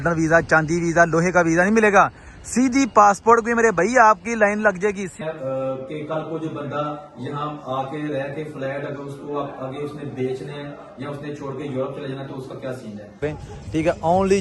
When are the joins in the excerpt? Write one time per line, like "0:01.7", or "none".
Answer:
0:05.2
0:13.2